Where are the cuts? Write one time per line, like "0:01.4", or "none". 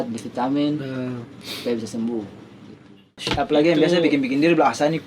0:03.2